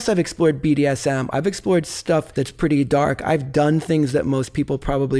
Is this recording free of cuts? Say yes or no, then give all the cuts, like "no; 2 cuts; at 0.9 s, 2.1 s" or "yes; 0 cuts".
no; 1 cut; at 2.3 s